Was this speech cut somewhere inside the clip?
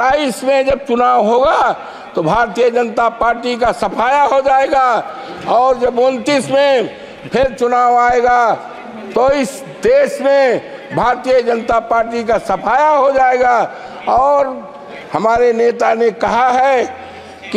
no; 0 cuts

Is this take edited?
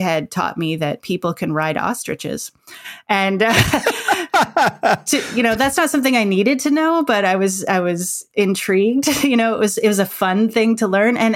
no; 0 cuts

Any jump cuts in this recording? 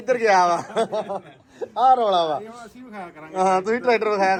no; 0 cuts

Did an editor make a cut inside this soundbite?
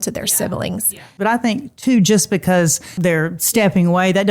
yes; 2 cuts; at 1.1 s, 2.8 s

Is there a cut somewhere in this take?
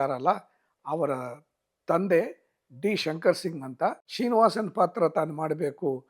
yes; 1 cut; at 4.1 s

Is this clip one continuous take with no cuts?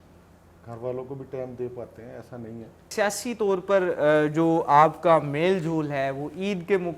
no; 1 cut; at 2.9 s

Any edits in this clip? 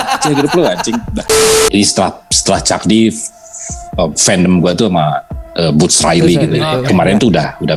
yes; 2 cuts; at 1.3 s, 6.8 s

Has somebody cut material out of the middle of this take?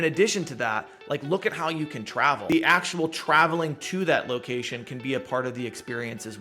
yes; 1 cut; at 2.5 s

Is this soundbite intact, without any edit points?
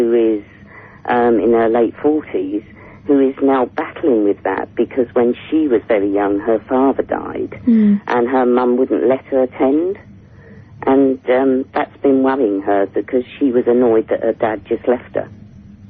no; 1 cut; at 2.3 s

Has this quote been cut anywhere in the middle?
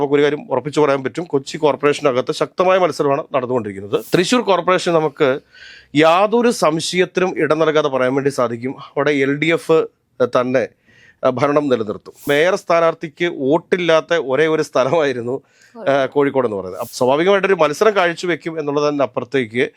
yes; 3 cuts; at 4.0 s, 12.1 s, 16.7 s

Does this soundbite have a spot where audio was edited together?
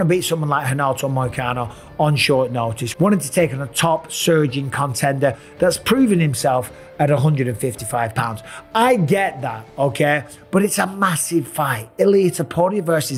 no; 0 cuts

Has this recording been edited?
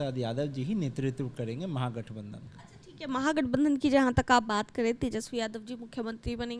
no; 0 cuts

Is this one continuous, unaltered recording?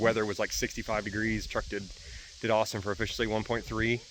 yes; 0 cuts

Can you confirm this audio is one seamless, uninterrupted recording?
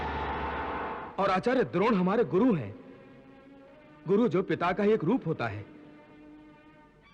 no; 1 cut; at 1.0 s

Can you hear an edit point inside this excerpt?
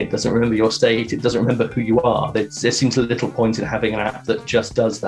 no; 0 cuts

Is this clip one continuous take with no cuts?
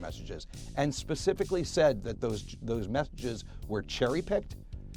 yes; 0 cuts

